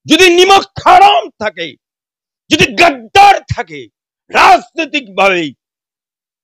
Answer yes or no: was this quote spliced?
no